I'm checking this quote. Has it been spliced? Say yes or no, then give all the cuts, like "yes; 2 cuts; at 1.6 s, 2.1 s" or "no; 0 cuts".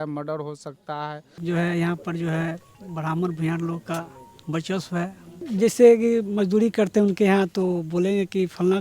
yes; 2 cuts; at 1.4 s, 5.4 s